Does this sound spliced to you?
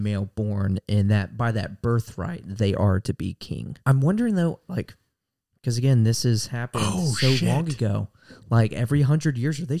yes; 1 cut; at 3.8 s

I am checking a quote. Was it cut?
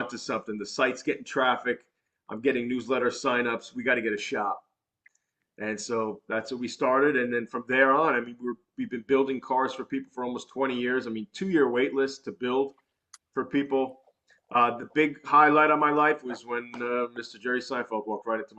no; 0 cuts

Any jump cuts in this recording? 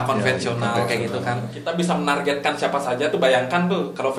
yes; 1 cut; at 1.6 s

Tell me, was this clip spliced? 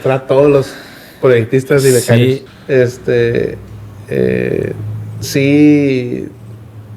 yes; 1 cut; at 2.5 s

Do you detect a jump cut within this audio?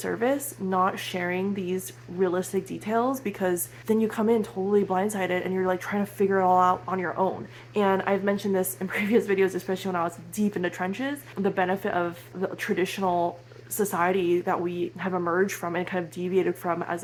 no; 0 cuts

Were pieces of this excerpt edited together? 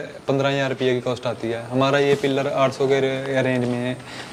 no; 0 cuts

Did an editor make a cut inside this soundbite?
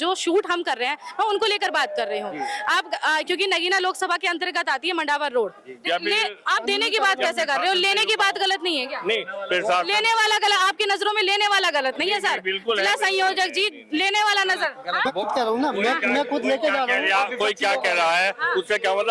yes; 2 cuts; at 5.7 s, 15.1 s

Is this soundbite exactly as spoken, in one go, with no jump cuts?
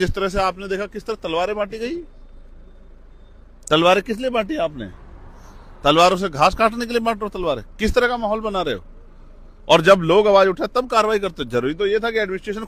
yes; 0 cuts

